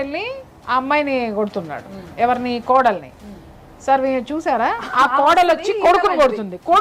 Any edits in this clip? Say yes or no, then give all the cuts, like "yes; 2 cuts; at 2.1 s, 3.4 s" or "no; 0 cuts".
no; 0 cuts